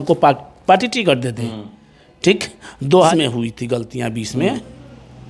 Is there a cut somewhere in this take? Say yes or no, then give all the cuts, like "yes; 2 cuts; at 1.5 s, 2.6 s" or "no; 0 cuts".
yes; 1 cut; at 3.1 s